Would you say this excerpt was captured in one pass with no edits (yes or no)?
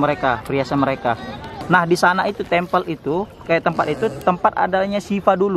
no